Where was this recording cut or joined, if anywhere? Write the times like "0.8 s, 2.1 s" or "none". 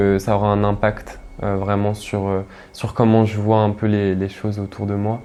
none